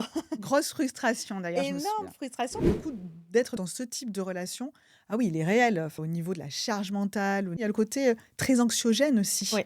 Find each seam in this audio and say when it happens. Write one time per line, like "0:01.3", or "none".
0:02.6
0:03.6
0:06.0
0:07.7